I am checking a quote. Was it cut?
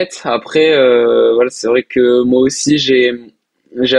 no; 0 cuts

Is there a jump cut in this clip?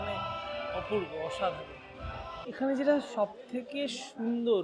yes; 1 cut; at 2.3 s

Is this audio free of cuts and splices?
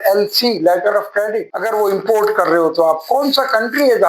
no; 1 cut; at 1.5 s

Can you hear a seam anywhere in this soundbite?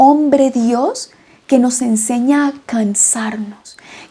no; 0 cuts

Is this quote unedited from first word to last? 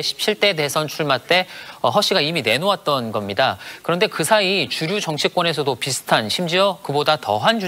yes; 0 cuts

